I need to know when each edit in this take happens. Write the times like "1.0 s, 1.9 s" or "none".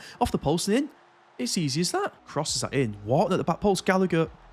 2.2 s